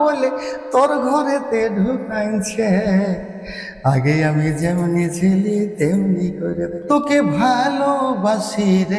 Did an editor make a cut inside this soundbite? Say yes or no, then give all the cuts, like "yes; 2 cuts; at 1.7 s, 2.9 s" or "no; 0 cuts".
yes; 1 cut; at 6.8 s